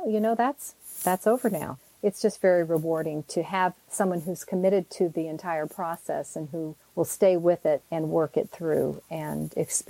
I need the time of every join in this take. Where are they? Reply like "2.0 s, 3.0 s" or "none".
1.8 s, 6.8 s, 7.9 s